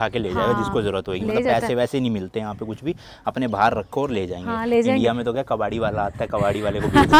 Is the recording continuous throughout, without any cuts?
yes; 0 cuts

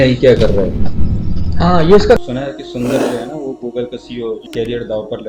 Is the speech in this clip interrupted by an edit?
yes; 2 cuts; at 2.2 s, 4.4 s

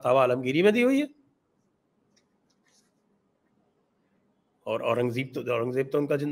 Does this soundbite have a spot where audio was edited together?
no; 0 cuts

